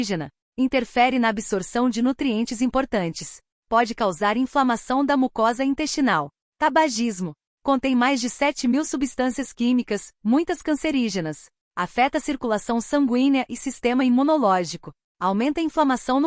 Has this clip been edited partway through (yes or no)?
yes